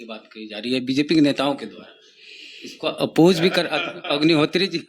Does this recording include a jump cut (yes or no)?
no